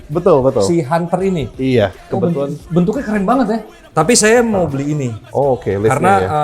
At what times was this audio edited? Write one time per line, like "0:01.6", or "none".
0:03.8